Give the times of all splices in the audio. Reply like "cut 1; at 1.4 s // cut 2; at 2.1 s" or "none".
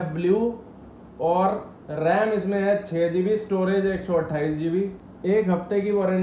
cut 1; at 5.0 s